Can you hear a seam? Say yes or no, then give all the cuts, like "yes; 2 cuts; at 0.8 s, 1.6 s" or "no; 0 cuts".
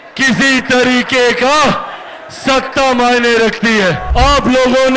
yes; 1 cut; at 4.0 s